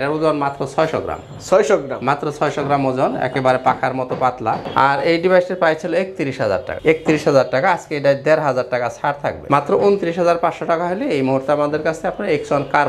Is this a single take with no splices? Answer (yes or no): yes